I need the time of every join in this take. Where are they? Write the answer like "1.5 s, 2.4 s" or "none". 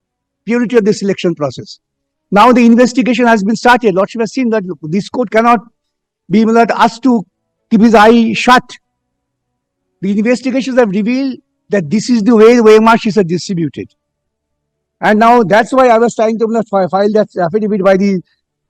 none